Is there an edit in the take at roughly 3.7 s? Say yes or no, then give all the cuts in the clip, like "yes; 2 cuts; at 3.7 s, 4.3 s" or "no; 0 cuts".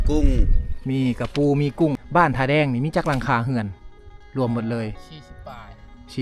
no; 1 cut; at 2.0 s